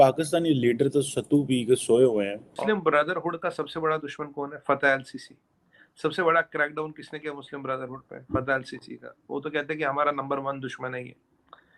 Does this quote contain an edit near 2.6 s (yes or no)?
yes